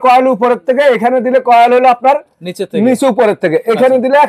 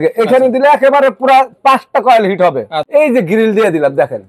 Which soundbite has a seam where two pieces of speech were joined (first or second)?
second